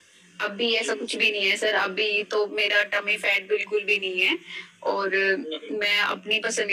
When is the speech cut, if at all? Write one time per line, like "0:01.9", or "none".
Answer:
none